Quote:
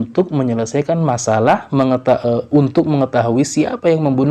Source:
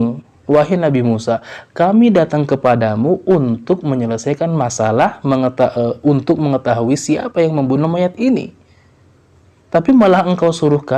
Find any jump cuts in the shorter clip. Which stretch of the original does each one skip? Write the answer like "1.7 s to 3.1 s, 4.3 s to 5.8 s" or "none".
none